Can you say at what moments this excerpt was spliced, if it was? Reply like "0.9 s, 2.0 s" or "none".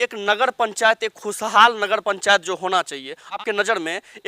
3.4 s